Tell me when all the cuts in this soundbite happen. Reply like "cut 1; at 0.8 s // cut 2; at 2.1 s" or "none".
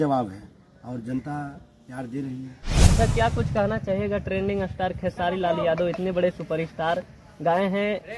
cut 1; at 2.6 s